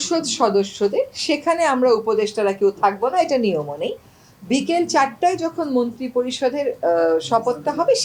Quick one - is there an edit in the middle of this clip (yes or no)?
no